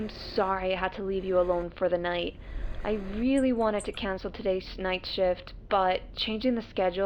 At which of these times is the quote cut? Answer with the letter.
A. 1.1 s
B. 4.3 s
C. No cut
C